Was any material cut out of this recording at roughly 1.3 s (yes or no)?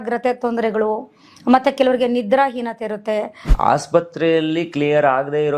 no